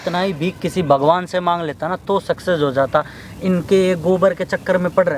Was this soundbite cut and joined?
no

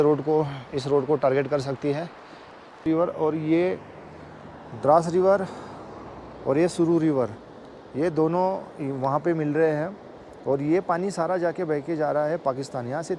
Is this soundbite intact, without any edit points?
no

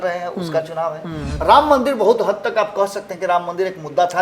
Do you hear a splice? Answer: yes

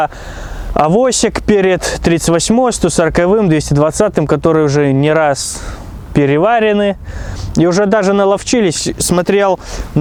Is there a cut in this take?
no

